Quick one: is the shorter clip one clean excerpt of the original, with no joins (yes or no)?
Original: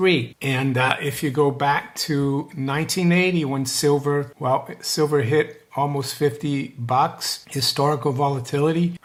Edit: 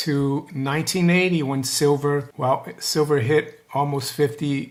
yes